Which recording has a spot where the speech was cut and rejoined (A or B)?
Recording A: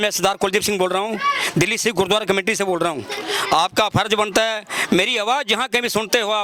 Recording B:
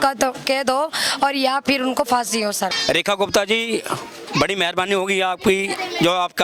B